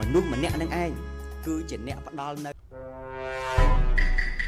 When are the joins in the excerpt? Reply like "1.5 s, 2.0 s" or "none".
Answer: 2.5 s